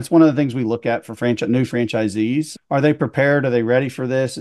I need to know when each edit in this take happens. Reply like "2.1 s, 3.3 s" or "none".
2.6 s